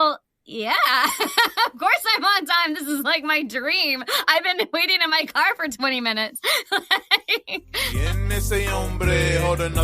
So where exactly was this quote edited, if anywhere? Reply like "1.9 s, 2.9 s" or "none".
8.0 s

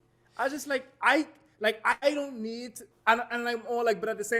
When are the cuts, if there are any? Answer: none

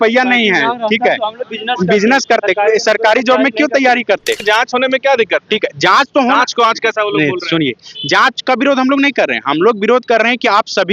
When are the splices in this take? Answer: 4.4 s

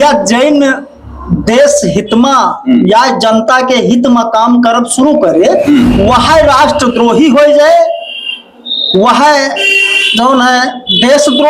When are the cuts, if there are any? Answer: none

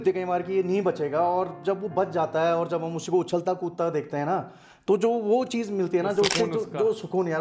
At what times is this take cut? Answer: none

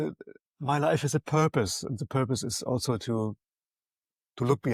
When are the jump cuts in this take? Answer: none

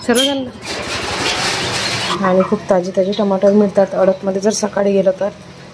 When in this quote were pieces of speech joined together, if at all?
2.1 s

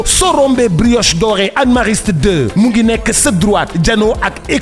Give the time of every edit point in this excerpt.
none

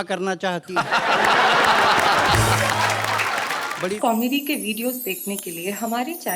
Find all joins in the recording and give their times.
3.9 s

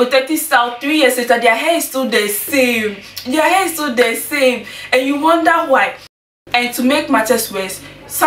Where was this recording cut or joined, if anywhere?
6.1 s

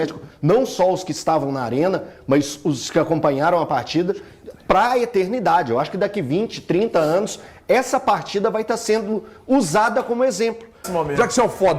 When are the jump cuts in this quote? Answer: 10.9 s

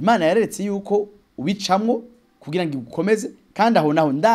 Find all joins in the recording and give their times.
none

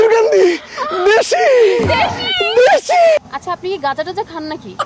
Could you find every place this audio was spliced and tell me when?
3.3 s

